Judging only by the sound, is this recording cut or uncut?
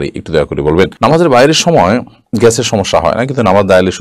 uncut